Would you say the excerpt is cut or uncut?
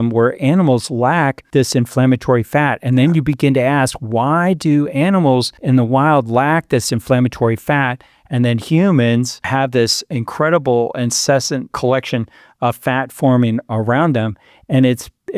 cut